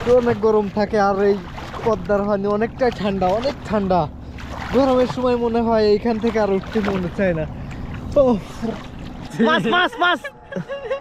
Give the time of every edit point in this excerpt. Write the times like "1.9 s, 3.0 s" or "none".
9.3 s